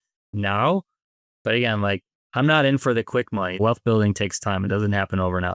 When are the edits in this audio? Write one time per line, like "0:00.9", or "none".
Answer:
0:02.2
0:03.6